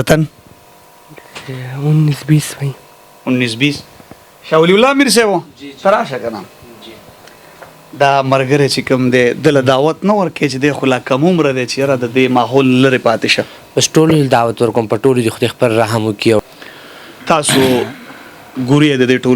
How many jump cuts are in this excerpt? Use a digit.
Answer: 1